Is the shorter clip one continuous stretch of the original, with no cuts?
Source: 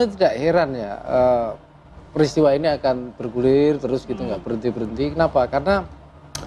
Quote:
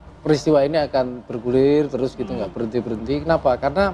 yes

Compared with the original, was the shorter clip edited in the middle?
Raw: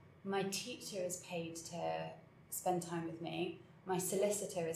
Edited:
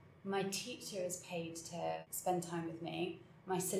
yes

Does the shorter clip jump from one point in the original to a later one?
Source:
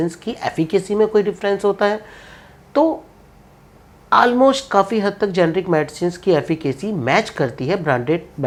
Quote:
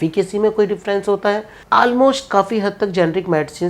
yes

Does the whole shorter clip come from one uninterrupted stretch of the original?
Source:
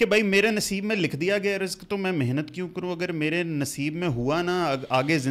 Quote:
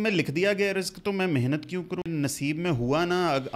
no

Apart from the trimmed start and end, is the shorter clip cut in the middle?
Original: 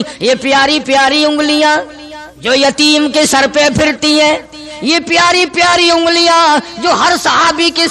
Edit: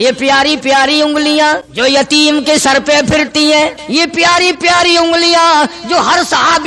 yes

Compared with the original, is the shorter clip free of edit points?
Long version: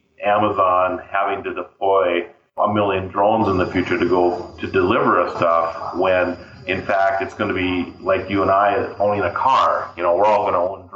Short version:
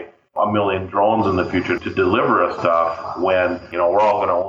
no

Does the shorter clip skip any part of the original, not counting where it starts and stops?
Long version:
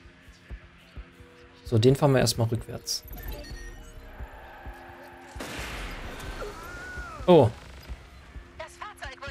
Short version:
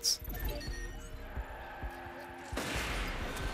no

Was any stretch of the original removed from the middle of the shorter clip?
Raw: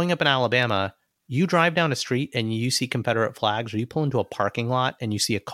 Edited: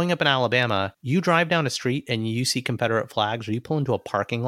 yes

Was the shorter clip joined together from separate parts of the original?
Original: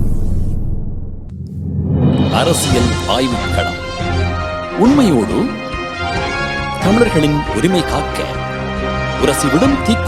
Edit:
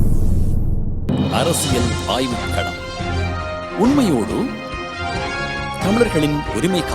yes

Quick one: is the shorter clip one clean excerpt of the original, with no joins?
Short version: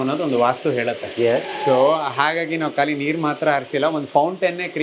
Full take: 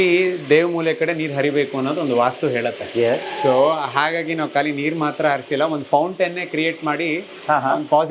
yes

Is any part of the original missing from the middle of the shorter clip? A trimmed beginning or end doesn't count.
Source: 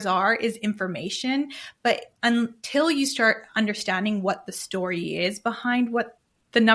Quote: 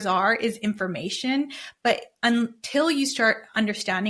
no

